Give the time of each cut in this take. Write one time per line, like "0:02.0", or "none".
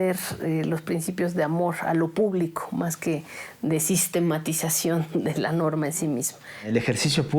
0:06.5